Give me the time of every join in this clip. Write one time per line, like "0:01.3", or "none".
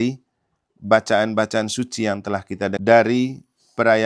0:02.8

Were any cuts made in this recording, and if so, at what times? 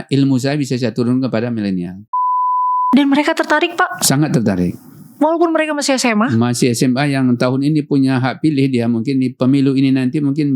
0:02.4

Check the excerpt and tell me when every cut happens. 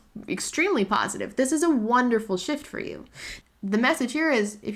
0:03.3

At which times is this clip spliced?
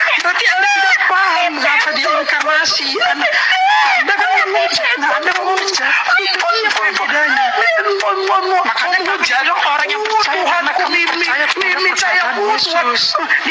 none

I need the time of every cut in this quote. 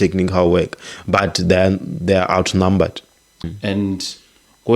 0:03.5

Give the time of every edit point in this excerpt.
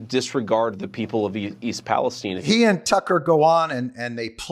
0:02.3

